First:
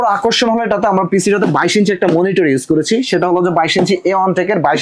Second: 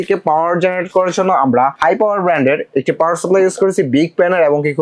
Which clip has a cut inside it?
second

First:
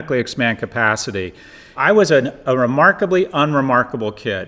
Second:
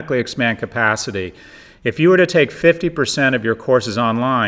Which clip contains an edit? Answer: first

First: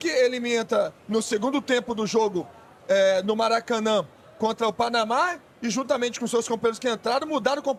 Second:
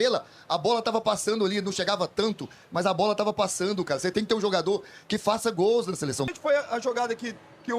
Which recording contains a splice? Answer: second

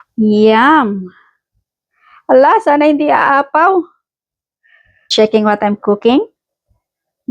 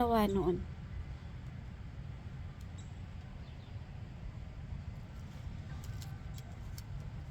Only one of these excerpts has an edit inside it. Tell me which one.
first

